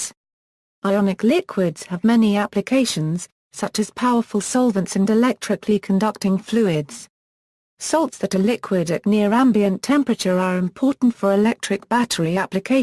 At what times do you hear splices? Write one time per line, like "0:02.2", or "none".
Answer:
0:02.2